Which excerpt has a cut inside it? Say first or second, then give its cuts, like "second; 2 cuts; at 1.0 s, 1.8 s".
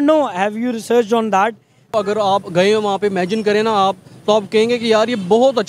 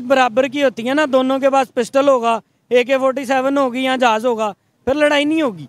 first; 1 cut; at 1.9 s